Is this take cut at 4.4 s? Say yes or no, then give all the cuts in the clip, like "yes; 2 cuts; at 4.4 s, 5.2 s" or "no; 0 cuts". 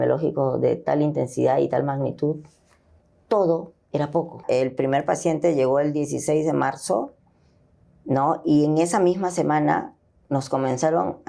yes; 1 cut; at 4.4 s